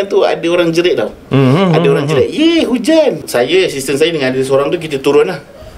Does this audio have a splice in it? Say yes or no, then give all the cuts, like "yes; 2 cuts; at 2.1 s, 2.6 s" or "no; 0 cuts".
yes; 1 cut; at 3.2 s